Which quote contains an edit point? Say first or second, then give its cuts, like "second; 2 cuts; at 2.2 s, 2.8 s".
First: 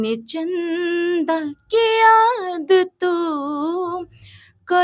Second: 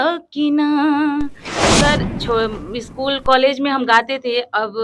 second; 1 cut; at 1.6 s